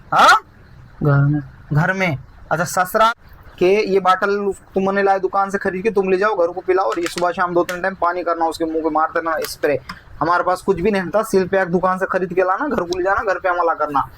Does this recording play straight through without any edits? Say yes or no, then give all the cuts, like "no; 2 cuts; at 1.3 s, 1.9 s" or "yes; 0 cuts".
no; 1 cut; at 3.1 s